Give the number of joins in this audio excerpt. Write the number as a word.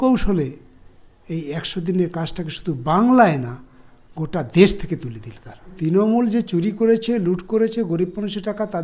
one